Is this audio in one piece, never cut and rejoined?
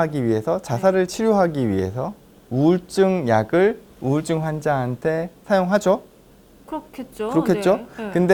yes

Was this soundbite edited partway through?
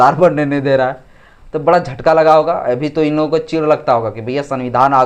no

